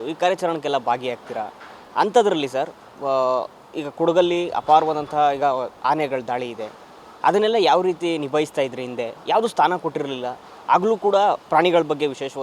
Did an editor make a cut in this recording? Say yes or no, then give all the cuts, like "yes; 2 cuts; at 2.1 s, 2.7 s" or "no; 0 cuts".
no; 0 cuts